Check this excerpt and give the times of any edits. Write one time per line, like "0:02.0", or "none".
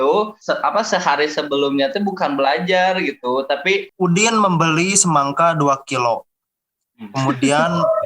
0:03.9